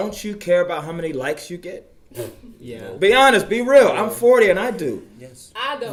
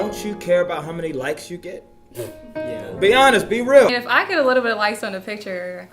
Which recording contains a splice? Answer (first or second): second